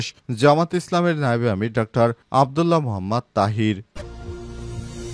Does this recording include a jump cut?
yes; 1 cut; at 3.9 s

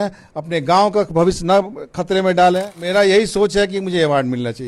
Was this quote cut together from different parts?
yes; 1 cut; at 2.8 s

